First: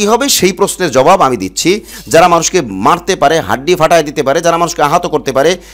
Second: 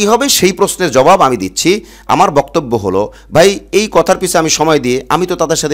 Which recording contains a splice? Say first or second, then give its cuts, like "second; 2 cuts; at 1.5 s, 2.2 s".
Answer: first; 1 cut; at 1.9 s